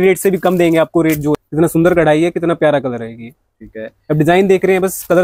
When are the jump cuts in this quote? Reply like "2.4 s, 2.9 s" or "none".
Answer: 1.4 s